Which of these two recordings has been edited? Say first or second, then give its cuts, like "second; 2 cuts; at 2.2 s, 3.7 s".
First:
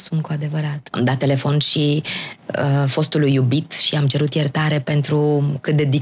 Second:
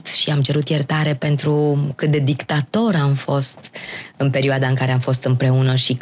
first; 1 cut; at 0.9 s